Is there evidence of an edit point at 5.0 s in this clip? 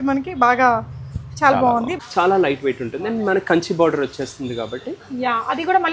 no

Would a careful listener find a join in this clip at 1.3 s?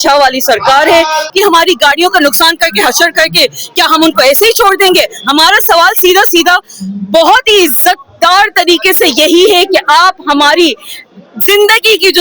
yes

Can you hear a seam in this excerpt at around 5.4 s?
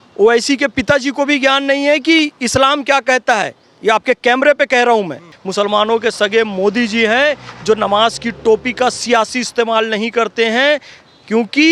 yes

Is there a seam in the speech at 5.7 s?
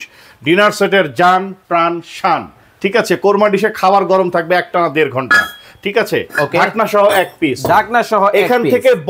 no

